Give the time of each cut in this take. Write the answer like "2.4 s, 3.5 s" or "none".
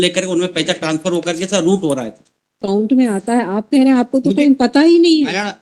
2.6 s